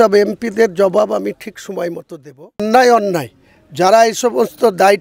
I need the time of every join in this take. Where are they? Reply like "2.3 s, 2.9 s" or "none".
2.6 s

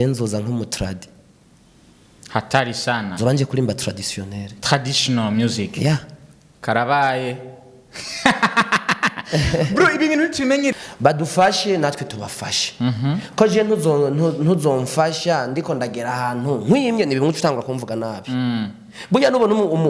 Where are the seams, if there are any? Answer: 10.7 s

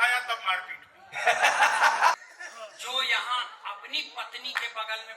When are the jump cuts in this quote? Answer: 2.2 s

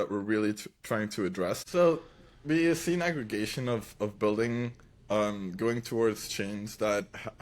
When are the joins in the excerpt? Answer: 1.6 s

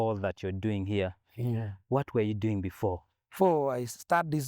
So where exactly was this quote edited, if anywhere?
3.3 s

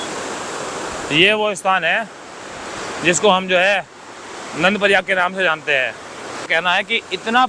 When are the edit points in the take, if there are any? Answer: 6.5 s

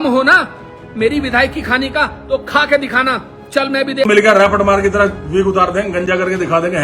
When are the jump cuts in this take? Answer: 4.1 s

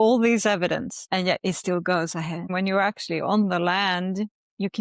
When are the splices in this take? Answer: 1.0 s, 2.5 s

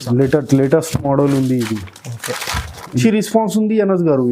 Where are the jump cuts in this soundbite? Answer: 3.0 s

